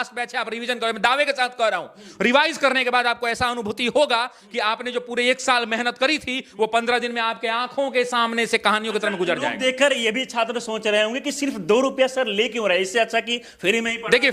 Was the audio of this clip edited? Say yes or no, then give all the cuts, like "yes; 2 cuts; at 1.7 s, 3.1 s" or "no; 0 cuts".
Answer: no; 0 cuts